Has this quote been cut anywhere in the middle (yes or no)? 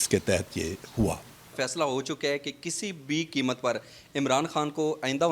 yes